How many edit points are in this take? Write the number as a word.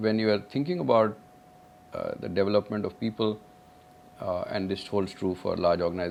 zero